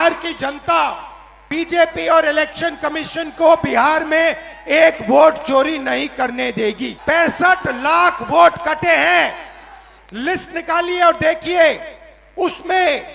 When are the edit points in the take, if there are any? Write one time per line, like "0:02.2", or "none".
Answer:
0:01.4
0:06.9